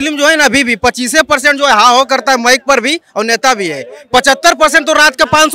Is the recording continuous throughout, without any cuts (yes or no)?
yes